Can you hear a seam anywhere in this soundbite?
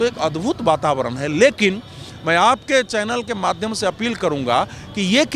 no; 0 cuts

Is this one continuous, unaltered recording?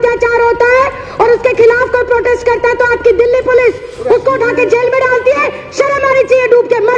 yes; 0 cuts

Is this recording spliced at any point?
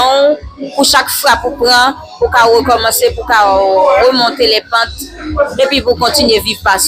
no; 0 cuts

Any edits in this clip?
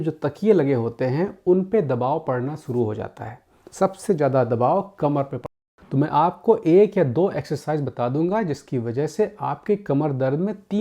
yes; 1 cut; at 5.6 s

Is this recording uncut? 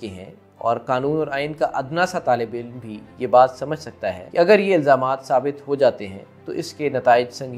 yes; 0 cuts

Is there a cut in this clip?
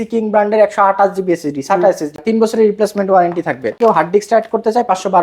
yes; 2 cuts; at 2.2 s, 3.7 s

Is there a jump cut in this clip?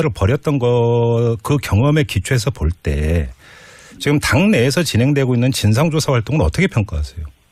no; 0 cuts

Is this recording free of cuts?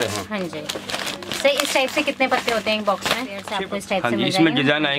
no; 1 cut; at 3.5 s

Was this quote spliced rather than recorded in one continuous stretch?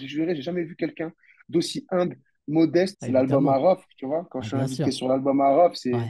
yes; 1 cut; at 3.0 s

